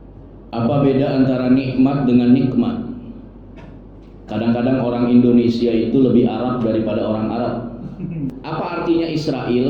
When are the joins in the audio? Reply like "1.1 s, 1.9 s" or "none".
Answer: 8.4 s